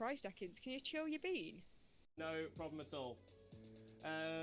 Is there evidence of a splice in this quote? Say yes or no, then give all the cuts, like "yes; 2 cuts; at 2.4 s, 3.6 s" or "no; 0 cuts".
yes; 1 cut; at 2.1 s